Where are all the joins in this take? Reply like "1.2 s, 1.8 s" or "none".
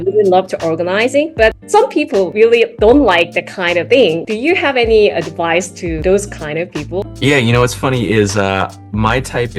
2.5 s, 3.8 s, 6.0 s